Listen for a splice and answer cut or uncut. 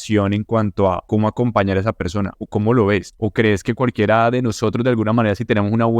cut